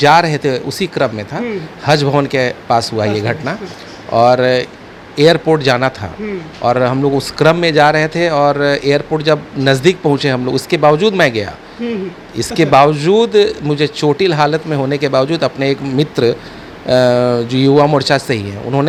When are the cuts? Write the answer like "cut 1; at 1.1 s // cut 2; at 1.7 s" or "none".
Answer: none